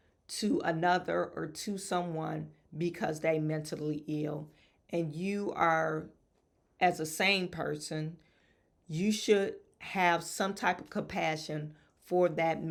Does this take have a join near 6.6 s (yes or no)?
no